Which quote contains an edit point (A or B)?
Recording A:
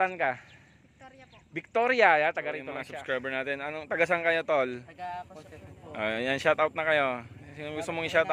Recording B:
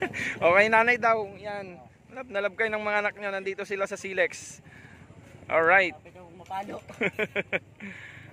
A